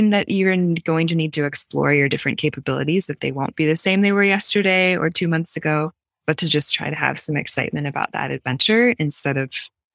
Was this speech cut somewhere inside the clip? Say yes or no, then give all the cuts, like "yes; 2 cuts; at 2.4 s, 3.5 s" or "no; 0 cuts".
no; 0 cuts